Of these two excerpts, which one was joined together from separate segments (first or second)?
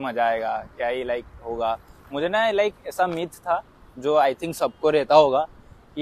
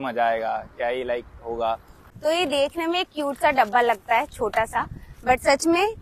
second